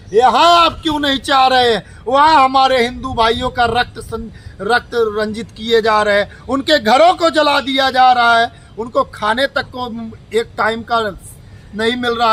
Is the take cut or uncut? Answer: uncut